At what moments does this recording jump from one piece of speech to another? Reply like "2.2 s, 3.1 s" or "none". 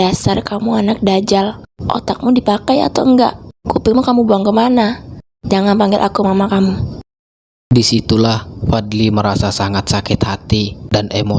none

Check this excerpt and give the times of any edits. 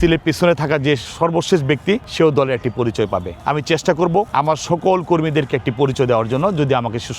2.1 s, 3.3 s, 4.3 s

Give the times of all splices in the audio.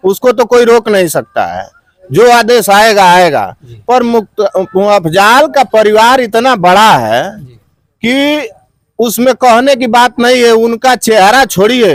none

